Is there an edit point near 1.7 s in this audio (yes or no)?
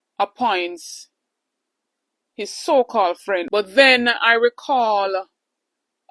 no